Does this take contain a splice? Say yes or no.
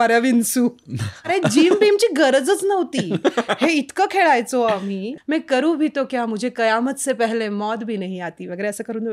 yes